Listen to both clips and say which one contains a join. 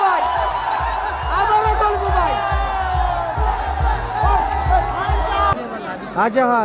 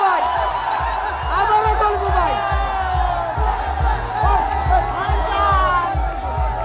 first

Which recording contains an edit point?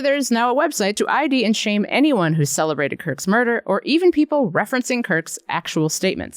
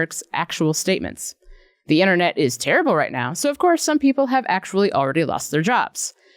first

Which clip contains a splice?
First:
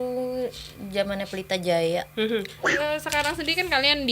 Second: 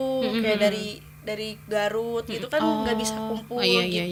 first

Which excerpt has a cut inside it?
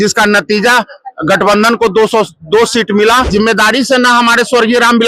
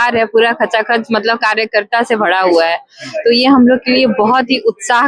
first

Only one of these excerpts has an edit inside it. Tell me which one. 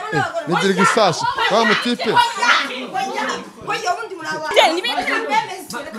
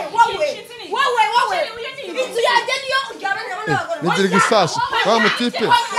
first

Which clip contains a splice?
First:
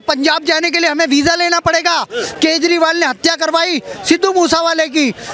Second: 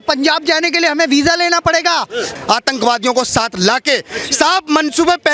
second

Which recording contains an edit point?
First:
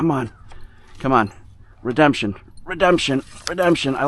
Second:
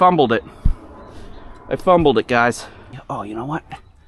second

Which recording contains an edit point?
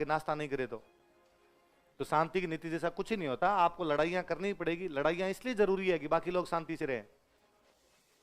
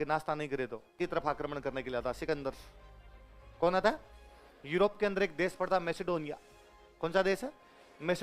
second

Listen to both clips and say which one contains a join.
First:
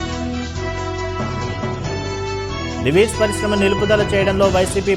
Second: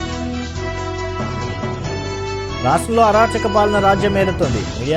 second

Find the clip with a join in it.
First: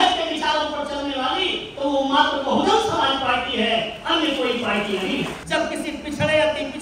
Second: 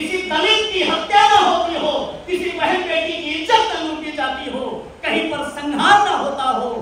first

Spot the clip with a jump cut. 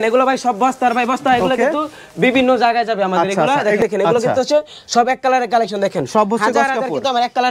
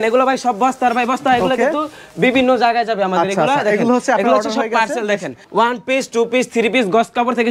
first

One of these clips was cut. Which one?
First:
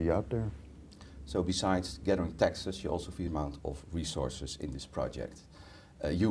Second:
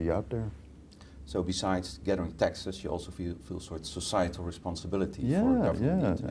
second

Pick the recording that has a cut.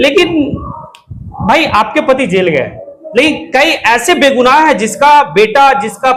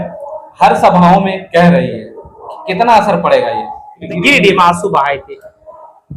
second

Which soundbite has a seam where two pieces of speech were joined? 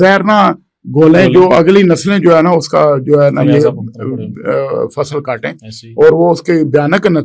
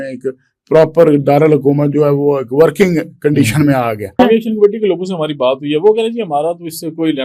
second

